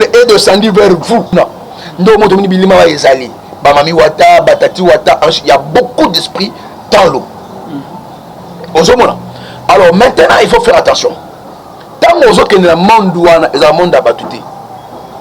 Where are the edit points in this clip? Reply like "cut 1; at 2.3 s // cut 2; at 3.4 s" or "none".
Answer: cut 1; at 1.3 s